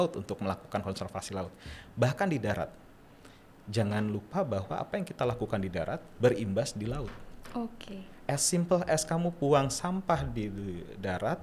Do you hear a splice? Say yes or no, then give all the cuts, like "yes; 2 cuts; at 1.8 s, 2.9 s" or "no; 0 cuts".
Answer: no; 0 cuts